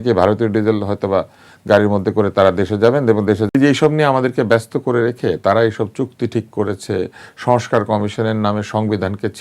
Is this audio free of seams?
no; 1 cut; at 3.5 s

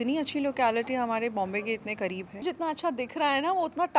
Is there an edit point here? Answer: yes; 1 cut; at 2.4 s

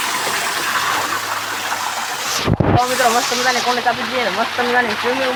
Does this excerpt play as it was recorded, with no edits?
yes; 0 cuts

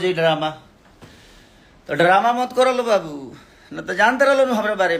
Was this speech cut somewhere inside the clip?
no; 0 cuts

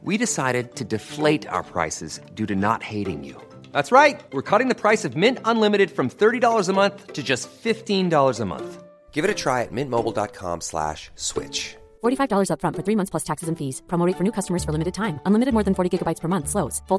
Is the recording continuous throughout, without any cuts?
yes; 0 cuts

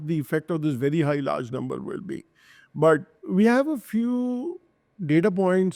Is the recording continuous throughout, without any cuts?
yes; 0 cuts

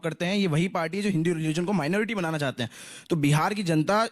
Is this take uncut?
yes; 0 cuts

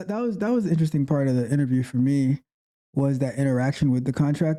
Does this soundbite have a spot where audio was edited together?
no; 0 cuts

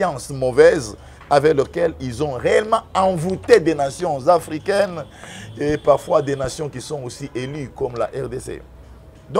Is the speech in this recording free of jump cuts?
yes; 0 cuts

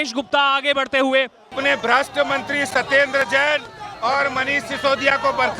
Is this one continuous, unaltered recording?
no; 1 cut; at 1.5 s

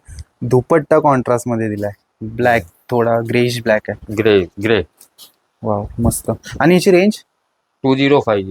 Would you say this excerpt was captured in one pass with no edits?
yes; 0 cuts

